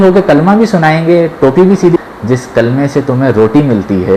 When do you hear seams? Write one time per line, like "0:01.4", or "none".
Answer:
0:02.0